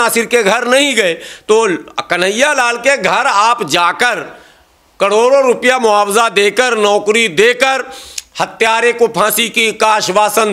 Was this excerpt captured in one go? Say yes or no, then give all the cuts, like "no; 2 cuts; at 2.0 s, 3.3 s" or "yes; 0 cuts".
yes; 0 cuts